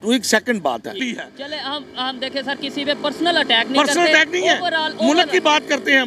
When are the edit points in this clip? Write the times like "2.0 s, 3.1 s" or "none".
1.0 s